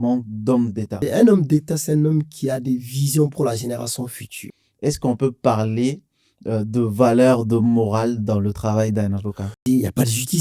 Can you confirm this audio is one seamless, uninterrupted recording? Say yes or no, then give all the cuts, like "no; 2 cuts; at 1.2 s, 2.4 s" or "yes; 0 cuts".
no; 3 cuts; at 1.0 s, 4.4 s, 9.6 s